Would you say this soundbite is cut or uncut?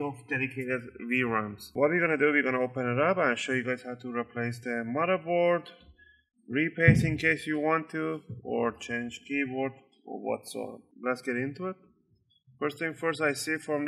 cut